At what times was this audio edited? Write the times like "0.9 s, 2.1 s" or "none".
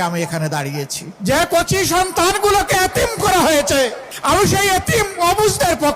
1.0 s, 4.1 s